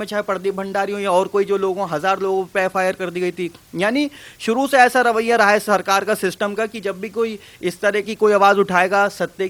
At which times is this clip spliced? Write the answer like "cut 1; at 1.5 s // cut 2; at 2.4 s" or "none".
none

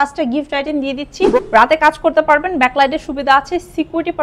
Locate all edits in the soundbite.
cut 1; at 1.4 s

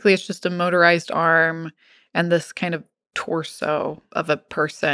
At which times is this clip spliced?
cut 1; at 4.0 s

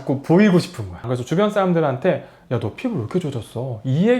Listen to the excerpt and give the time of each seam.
cut 1; at 1.1 s

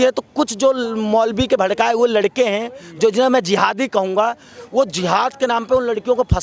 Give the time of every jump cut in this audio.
none

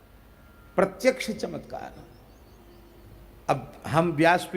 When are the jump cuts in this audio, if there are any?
cut 1; at 3.2 s

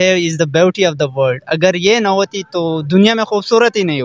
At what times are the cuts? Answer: none

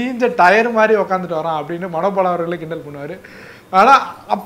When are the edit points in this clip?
none

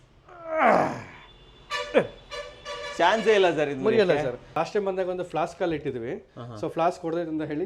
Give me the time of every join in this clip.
cut 1; at 4.5 s

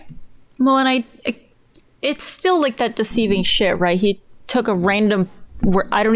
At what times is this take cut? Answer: none

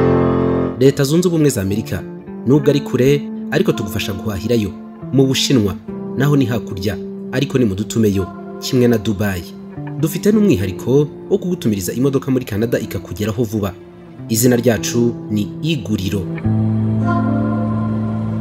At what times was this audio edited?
none

